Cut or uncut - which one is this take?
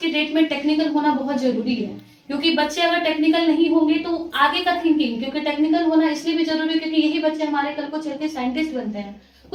uncut